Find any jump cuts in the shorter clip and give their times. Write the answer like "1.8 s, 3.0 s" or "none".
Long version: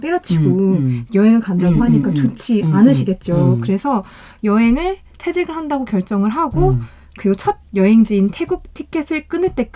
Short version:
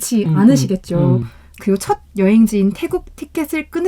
1.2 s